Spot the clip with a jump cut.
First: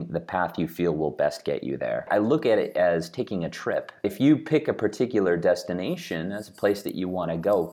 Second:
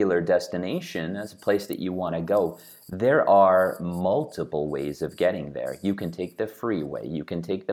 first; 2 cuts; at 2.0 s, 4.0 s

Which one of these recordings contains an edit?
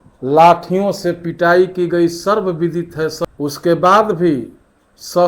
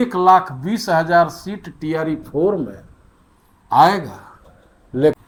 first; 1 cut; at 3.2 s

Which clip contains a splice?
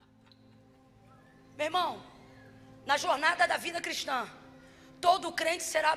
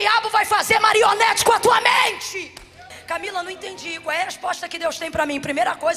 second; 1 cut; at 2.9 s

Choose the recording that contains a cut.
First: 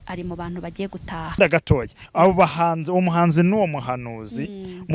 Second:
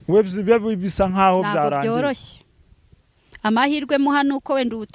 first; 1 cut; at 1.4 s

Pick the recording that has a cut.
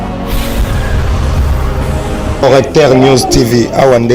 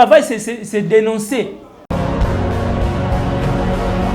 second; 1 cut; at 1.7 s

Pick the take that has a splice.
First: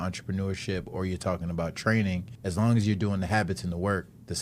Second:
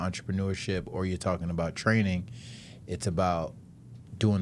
first; 1 cut; at 2.3 s

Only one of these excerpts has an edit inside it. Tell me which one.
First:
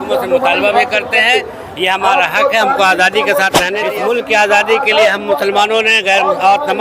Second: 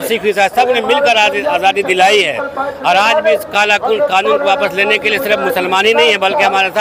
first; 1 cut; at 3.7 s

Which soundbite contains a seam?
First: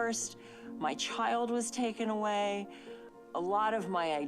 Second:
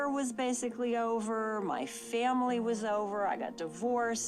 first; 1 cut; at 3.1 s

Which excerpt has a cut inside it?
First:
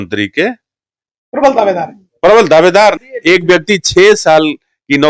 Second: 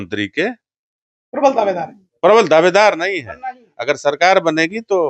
first; 1 cut; at 3.1 s

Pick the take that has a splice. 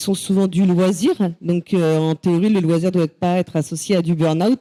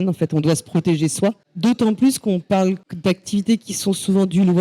second; 2 cuts; at 1.5 s, 2.9 s

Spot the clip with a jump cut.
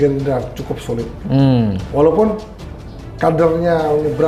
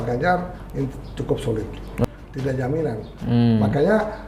second; 1 cut; at 2.0 s

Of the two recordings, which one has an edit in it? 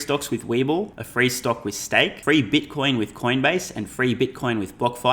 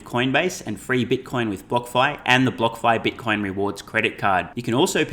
first; 2 cuts; at 1.0 s, 2.2 s

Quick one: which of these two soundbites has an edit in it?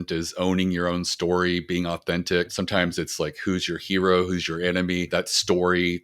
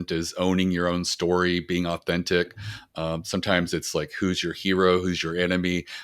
first; 2 cuts; at 2.5 s, 5.1 s

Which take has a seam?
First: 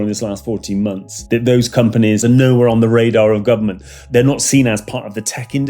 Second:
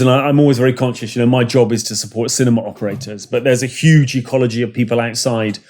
first; 3 cuts; at 1.1 s, 2.2 s, 4.0 s

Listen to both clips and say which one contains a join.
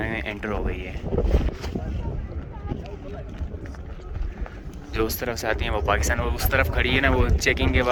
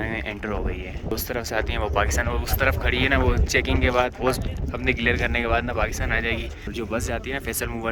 second; 2 cuts; at 1.1 s, 6.7 s

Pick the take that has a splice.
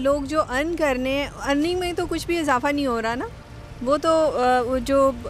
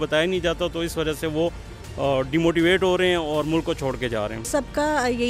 second; 1 cut; at 4.4 s

